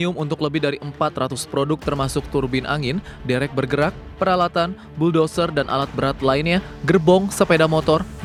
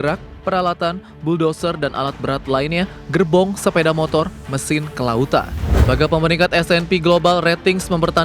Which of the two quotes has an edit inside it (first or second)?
second